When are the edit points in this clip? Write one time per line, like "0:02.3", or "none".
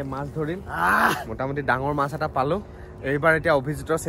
none